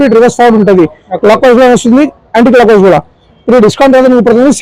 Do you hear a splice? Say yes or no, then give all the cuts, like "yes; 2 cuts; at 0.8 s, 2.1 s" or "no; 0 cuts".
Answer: no; 0 cuts